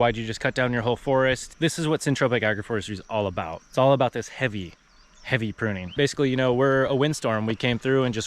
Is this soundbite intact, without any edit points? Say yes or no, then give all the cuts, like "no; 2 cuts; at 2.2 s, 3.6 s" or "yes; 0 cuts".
no; 3 cuts; at 1.5 s, 3.5 s, 5.9 s